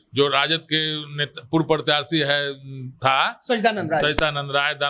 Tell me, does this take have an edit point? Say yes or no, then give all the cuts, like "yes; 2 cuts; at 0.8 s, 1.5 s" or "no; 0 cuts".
no; 0 cuts